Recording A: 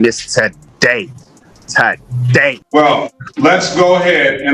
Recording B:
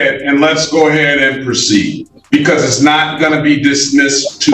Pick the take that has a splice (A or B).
A